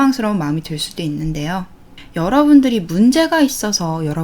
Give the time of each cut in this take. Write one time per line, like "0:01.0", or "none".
0:01.8